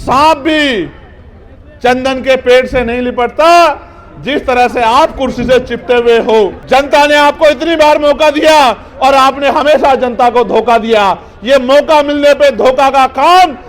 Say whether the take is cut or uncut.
cut